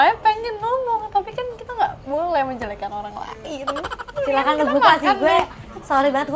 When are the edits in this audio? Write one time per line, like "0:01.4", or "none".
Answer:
none